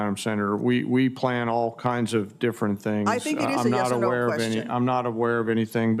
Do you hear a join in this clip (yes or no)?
no